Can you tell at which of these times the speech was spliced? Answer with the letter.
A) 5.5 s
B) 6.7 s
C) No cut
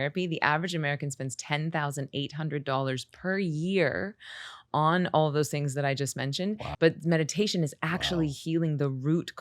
B